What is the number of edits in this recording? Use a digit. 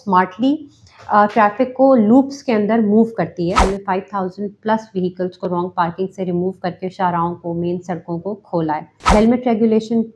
2